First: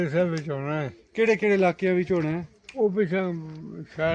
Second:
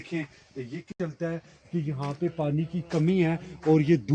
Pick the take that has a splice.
second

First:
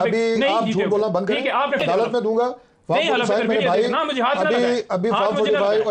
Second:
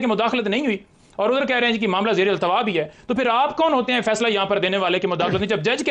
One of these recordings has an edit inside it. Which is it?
first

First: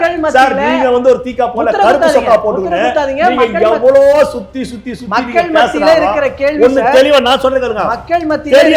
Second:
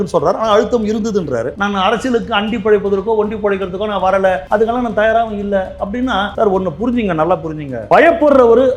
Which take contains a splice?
second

